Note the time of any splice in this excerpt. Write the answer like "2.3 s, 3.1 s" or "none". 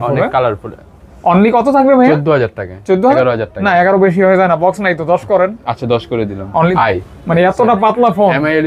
3.2 s, 6.7 s